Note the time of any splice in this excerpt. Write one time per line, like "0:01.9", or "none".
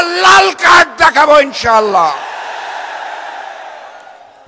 none